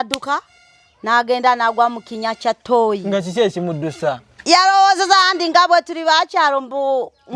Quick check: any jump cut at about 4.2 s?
yes; 1 cut; at 4.2 s

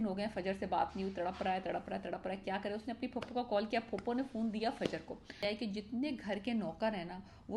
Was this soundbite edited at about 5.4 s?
yes; 1 cut; at 5.4 s

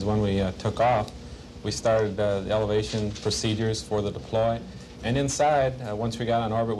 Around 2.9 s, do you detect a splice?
yes; 1 cut; at 2.9 s

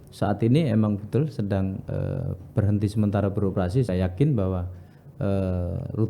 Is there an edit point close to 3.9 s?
yes; 1 cut; at 3.9 s

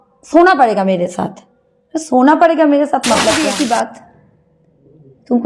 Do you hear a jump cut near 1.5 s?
no; 1 cut; at 3.3 s

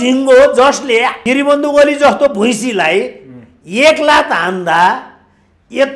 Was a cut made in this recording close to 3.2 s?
no; 1 cut; at 1.2 s

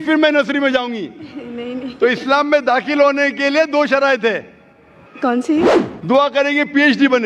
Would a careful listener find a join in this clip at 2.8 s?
no; 1 cut; at 5.9 s

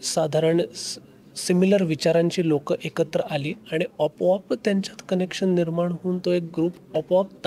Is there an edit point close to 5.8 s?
no; 0 cuts

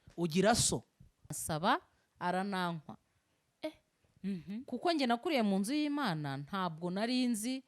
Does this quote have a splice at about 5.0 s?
no; 1 cut; at 1.3 s

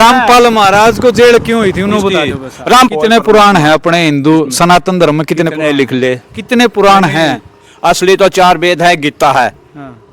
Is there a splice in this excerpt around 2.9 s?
yes; 1 cut; at 2.9 s

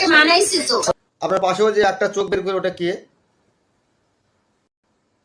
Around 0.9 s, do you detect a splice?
yes; 1 cut; at 0.9 s

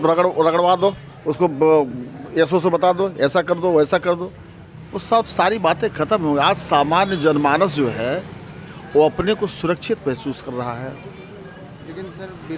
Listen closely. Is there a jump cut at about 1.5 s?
no; 0 cuts

